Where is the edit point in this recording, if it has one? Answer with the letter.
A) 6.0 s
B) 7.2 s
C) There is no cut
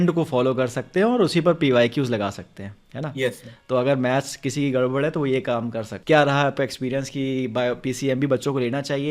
A